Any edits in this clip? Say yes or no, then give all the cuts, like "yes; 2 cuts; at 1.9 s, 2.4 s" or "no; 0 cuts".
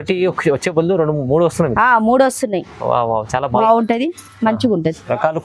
yes; 1 cut; at 3.6 s